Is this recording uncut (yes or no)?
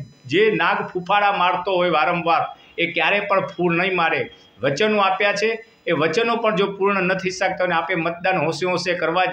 yes